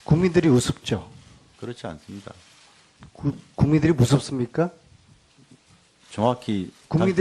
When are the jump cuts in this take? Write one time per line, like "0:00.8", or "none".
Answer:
0:02.2